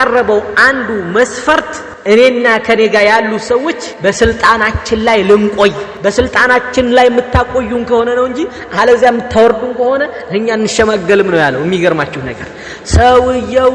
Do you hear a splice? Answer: yes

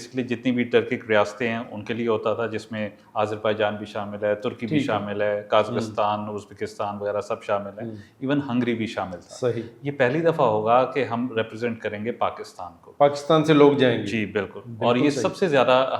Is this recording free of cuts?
yes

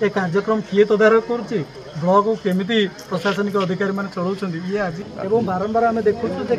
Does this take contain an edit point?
yes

